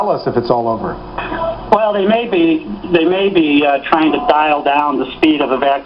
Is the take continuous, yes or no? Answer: no